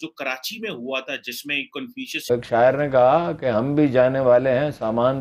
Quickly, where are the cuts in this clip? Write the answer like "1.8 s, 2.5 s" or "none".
2.3 s

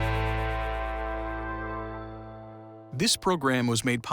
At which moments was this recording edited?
2.8 s

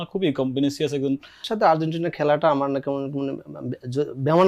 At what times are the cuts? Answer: 1.5 s

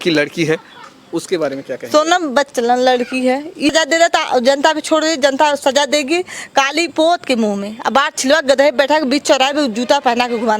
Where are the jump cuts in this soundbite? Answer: 3.7 s

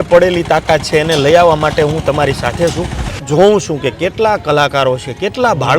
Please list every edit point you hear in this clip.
3.2 s

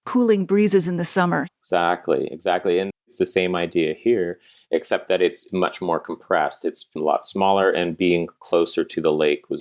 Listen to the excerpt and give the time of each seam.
1.5 s, 3.1 s

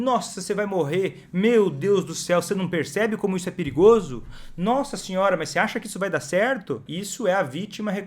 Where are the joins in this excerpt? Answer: 6.9 s

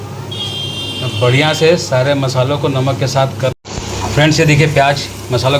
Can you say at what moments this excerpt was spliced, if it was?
3.5 s

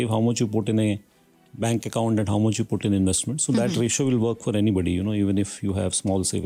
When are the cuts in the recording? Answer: none

